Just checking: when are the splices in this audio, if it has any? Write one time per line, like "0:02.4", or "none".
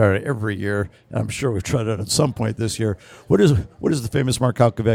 none